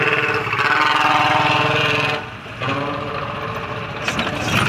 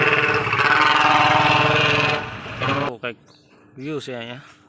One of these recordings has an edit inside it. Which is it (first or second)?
second